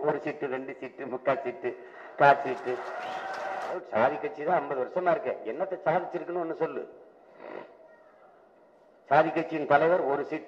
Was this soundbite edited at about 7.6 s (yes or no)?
no